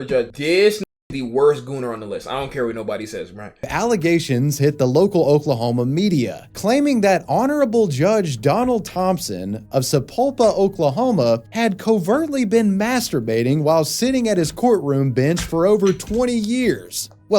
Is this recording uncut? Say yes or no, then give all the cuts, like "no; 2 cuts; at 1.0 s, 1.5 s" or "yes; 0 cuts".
no; 1 cut; at 3.6 s